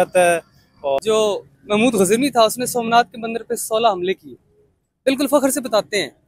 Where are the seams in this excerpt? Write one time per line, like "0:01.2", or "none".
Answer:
0:01.0